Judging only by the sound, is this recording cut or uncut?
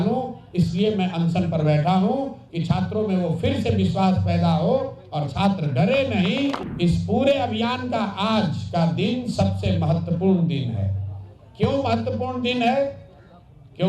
cut